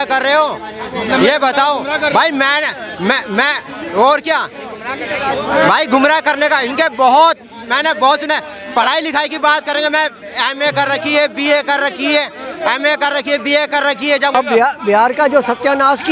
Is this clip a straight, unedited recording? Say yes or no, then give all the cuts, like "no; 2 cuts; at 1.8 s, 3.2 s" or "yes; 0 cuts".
no; 1 cut; at 14.3 s